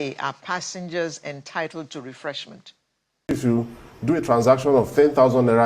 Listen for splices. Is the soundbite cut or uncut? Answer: cut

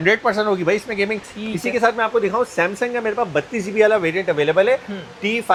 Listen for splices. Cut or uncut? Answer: uncut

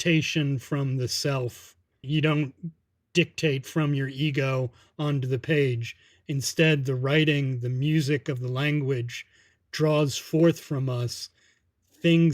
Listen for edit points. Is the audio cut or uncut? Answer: cut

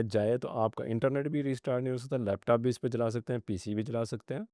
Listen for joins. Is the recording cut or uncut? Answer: uncut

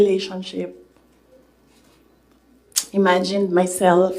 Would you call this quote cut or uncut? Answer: cut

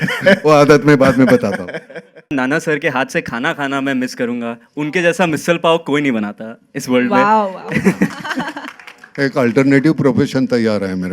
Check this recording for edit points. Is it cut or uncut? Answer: cut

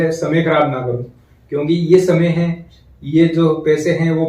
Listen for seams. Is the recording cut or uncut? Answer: uncut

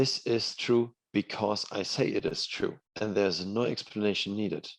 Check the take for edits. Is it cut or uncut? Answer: cut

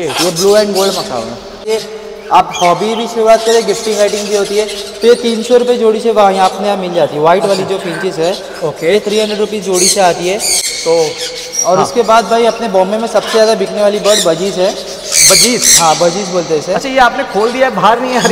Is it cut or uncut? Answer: cut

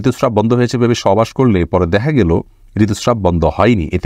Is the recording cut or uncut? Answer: uncut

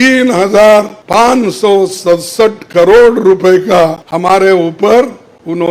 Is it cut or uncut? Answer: cut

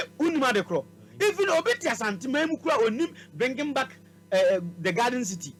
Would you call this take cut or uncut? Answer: uncut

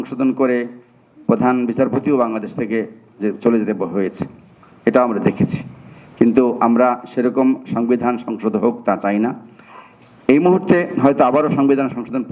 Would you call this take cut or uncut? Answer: uncut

